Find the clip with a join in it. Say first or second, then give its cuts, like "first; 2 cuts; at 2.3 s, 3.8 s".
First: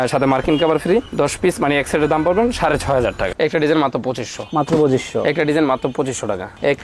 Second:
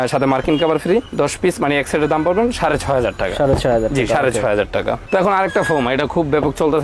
first; 1 cut; at 3.3 s